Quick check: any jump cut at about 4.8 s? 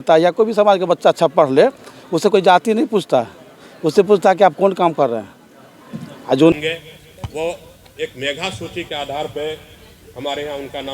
no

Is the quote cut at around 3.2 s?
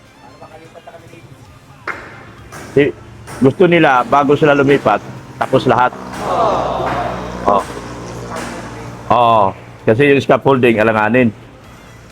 no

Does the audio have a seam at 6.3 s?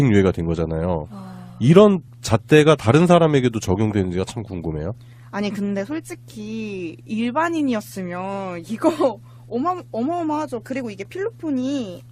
no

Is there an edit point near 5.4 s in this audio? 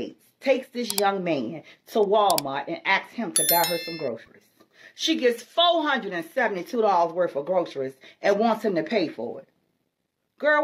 no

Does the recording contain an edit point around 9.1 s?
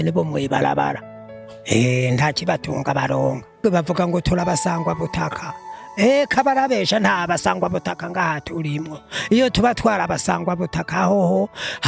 no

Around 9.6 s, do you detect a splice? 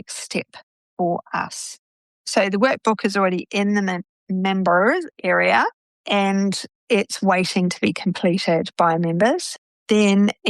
yes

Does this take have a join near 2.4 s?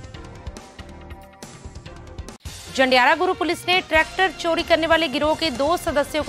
no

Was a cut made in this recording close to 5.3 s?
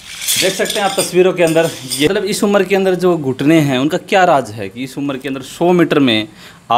no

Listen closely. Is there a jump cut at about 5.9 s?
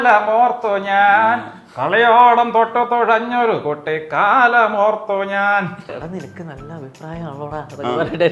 yes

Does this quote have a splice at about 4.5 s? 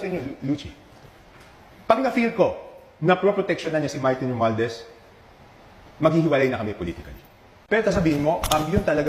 no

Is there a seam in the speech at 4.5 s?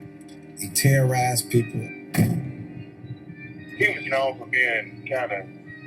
no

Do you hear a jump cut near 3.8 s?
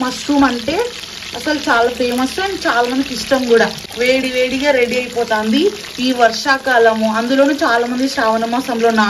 yes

